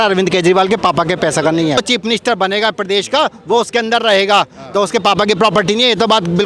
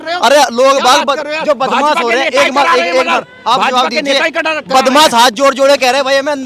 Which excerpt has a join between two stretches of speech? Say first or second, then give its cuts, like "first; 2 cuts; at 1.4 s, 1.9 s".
first; 1 cut; at 1.8 s